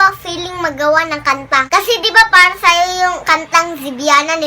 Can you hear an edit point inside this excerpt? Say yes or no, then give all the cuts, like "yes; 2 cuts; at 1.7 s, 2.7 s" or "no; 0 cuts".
no; 0 cuts